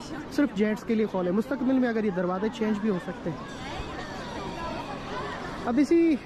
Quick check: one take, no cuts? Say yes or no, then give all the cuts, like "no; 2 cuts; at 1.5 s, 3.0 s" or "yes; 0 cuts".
yes; 0 cuts